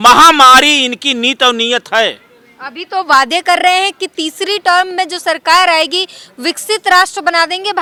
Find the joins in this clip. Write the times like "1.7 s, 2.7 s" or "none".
none